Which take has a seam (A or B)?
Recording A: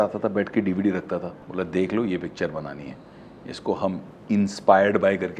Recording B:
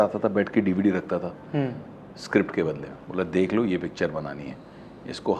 A